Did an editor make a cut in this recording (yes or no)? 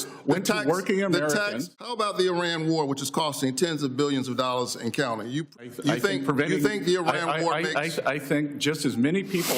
yes